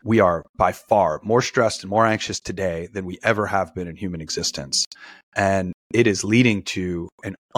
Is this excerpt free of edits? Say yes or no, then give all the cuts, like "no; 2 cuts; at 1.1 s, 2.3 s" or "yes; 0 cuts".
yes; 0 cuts